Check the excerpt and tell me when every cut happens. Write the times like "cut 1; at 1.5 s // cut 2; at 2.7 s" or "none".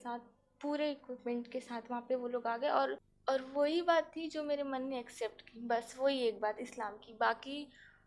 cut 1; at 3.1 s